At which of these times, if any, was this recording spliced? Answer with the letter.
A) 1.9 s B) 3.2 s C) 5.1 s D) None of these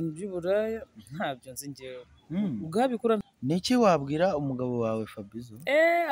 B